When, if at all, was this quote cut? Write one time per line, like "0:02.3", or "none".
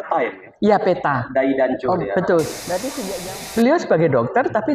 0:03.2